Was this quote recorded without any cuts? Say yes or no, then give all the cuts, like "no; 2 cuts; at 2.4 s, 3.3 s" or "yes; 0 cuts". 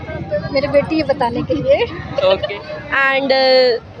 no; 1 cut; at 2.5 s